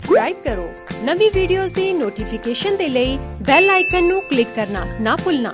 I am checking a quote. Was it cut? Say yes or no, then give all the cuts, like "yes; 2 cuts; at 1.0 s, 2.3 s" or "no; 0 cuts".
no; 0 cuts